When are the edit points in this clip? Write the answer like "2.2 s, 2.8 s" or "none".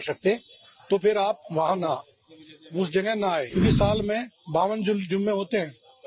3.5 s